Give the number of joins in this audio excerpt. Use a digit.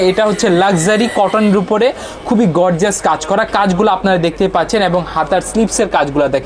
0